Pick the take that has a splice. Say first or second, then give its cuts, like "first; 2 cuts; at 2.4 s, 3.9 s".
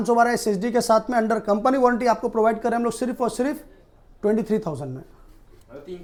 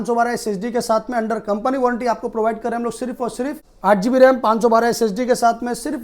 second; 1 cut; at 3.7 s